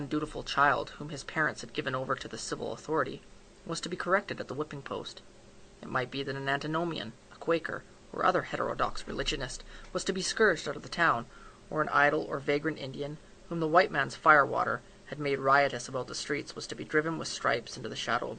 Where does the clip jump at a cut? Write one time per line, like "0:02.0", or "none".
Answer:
0:08.2